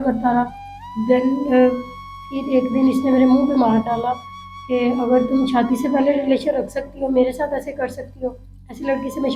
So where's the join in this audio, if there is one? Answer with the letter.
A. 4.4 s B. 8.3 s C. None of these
C